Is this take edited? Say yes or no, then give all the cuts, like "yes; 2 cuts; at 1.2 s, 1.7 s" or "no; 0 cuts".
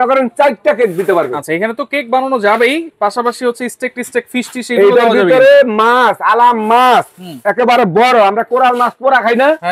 no; 0 cuts